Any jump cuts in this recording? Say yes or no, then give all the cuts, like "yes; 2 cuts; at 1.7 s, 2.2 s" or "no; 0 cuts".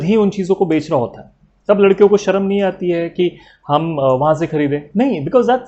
no; 0 cuts